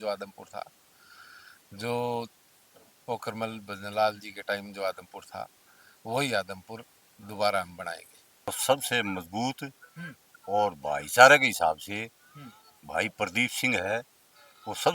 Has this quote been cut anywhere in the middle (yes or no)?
yes